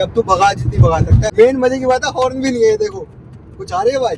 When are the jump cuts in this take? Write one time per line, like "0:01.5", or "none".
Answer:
0:01.2